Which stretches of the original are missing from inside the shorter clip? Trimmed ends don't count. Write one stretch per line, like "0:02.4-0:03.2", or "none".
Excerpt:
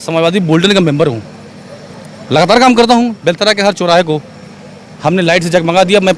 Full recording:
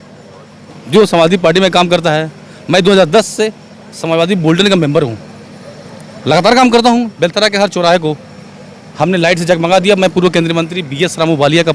none